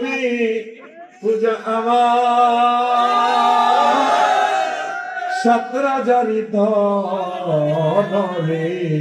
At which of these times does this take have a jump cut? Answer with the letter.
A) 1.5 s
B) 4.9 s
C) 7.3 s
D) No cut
D